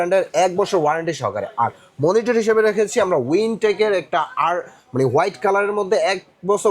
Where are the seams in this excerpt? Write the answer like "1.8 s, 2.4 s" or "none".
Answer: none